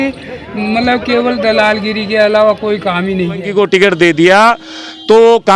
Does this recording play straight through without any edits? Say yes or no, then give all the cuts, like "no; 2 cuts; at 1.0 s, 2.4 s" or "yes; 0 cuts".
no; 1 cut; at 3.5 s